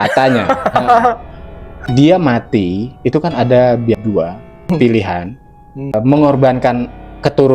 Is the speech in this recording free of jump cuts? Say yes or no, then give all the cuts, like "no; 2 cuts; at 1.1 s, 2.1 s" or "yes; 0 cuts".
no; 3 cuts; at 1.9 s, 4.1 s, 5.9 s